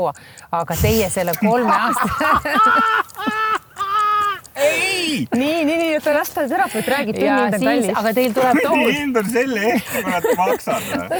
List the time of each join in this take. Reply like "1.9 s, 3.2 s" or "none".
none